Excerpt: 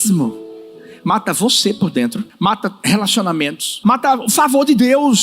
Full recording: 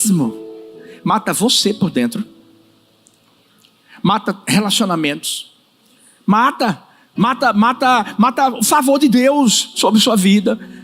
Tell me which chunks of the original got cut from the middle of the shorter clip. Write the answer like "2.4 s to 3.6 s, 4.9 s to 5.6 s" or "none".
2.3 s to 3.9 s, 5.4 s to 8.1 s